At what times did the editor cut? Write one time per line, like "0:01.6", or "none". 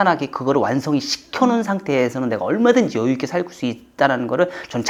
none